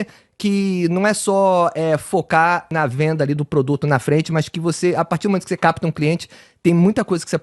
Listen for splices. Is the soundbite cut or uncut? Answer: cut